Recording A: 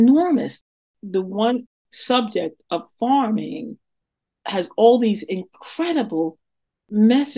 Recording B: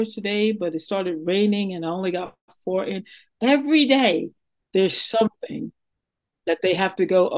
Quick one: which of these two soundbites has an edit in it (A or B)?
A